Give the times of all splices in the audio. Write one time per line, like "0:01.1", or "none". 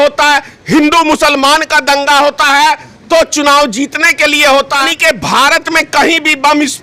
0:04.9